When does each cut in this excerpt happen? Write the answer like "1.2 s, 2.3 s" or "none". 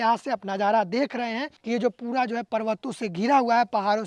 1.5 s